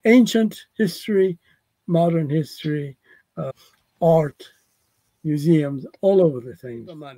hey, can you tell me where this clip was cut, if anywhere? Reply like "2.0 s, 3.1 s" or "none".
3.5 s